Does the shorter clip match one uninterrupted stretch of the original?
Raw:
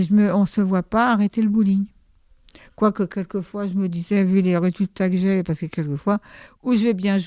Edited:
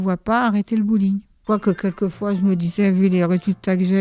no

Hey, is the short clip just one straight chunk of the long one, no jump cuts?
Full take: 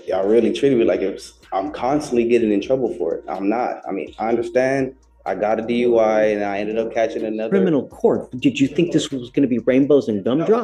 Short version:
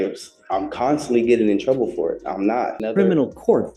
no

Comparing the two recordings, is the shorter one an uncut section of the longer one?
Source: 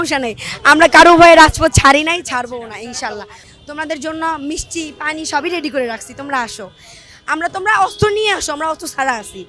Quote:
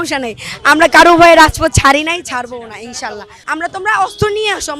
no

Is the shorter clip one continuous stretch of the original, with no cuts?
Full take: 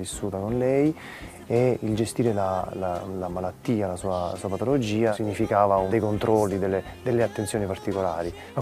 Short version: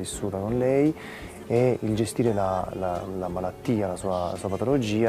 yes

